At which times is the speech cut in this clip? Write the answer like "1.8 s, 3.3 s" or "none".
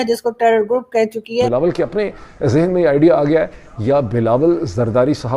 1.5 s